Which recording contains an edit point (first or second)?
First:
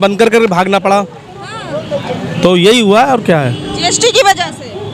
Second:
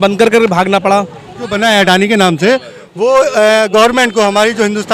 second